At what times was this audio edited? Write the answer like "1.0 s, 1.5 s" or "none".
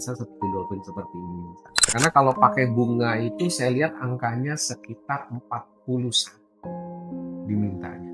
1.9 s